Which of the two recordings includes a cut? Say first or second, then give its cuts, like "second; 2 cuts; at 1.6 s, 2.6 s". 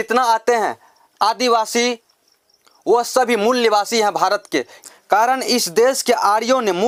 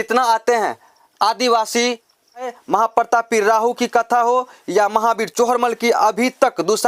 second; 1 cut; at 2.6 s